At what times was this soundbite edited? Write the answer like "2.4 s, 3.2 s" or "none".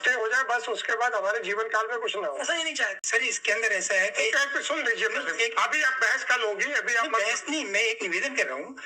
3.0 s